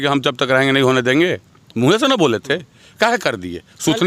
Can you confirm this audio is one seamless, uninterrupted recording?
yes; 0 cuts

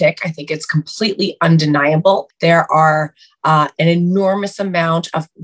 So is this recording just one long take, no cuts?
yes; 0 cuts

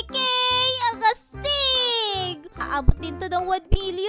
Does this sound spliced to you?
yes; 1 cut; at 2.6 s

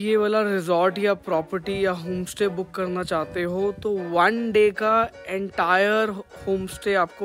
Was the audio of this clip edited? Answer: no; 0 cuts

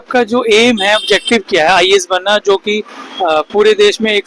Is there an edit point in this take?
no; 0 cuts

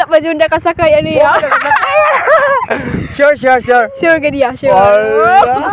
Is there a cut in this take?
no; 0 cuts

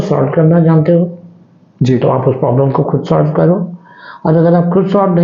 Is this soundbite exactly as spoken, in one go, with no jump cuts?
yes; 0 cuts

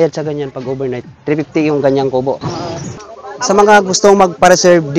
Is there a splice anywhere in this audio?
yes; 2 cuts; at 1.1 s, 3.0 s

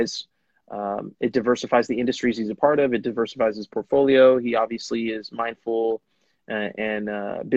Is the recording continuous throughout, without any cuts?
yes; 0 cuts

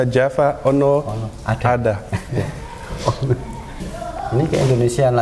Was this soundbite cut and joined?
yes; 1 cut; at 3.8 s

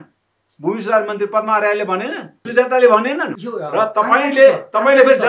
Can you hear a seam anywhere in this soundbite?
yes; 2 cuts; at 2.4 s, 3.3 s

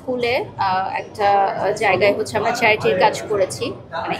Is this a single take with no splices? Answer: yes; 0 cuts

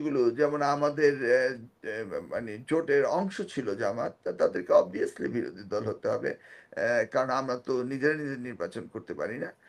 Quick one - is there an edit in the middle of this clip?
no; 0 cuts

